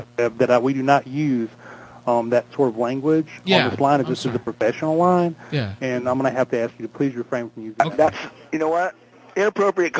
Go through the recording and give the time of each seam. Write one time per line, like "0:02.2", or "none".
0:07.8